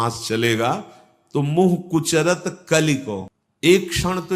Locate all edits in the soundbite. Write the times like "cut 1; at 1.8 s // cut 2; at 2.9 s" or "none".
cut 1; at 3.3 s